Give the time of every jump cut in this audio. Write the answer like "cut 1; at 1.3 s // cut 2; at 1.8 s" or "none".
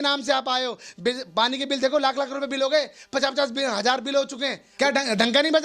cut 1; at 4.6 s